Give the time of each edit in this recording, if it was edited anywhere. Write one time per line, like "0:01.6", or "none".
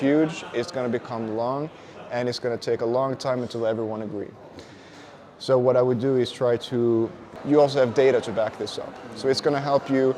0:07.3